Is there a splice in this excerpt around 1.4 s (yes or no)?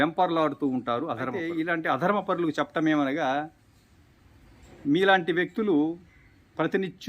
yes